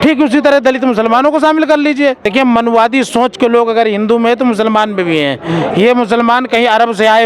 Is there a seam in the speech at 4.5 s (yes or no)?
no